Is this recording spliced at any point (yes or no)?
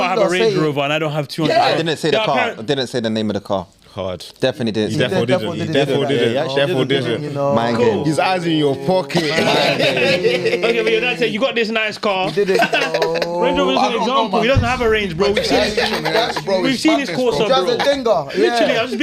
no